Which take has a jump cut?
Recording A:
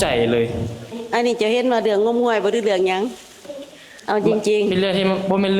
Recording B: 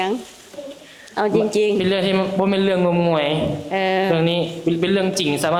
A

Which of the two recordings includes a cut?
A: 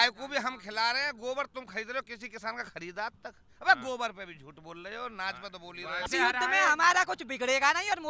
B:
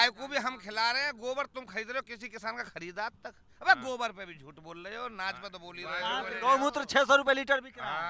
A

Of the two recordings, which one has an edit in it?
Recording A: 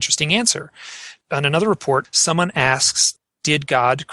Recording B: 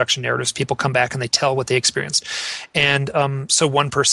A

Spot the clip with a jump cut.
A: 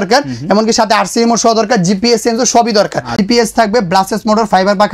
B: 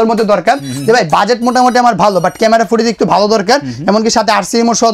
A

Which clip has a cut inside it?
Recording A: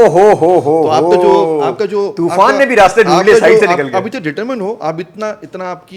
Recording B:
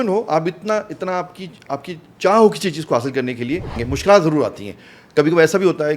B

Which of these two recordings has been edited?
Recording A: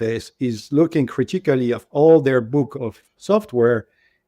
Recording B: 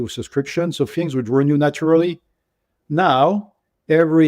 A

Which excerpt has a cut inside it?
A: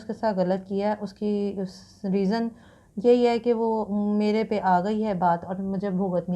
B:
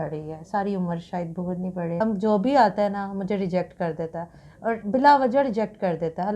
B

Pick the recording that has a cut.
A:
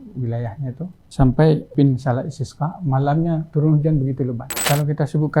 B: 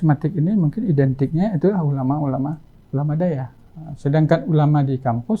A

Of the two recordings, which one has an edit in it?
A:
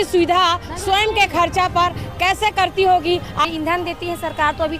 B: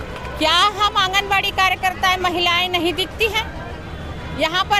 A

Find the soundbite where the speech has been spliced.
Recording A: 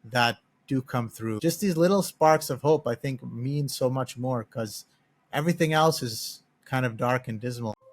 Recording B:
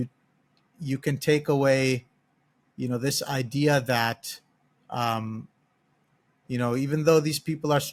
A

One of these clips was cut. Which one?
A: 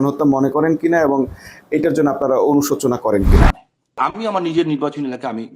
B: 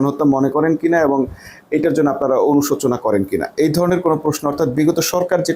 A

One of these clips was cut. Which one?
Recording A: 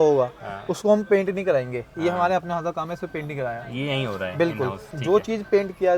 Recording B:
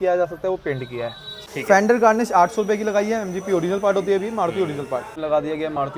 B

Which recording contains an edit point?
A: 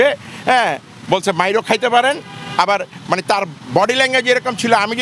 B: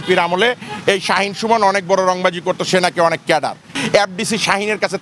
B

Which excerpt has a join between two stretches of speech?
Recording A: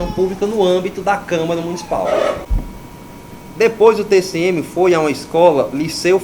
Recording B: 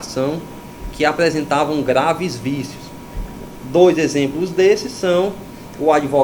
A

